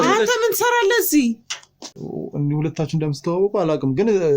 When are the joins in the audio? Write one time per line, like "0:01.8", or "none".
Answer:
0:02.0